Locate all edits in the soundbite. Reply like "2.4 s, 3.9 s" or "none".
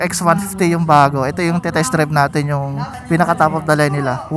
2.9 s